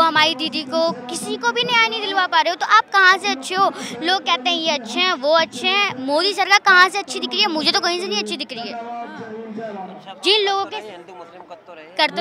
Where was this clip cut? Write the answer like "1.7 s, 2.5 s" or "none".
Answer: none